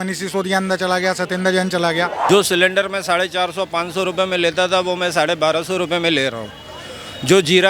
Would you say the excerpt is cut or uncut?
cut